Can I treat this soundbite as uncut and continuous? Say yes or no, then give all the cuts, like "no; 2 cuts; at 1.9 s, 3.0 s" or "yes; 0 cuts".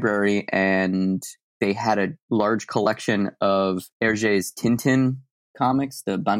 no; 3 cuts; at 1.5 s, 2.2 s, 3.9 s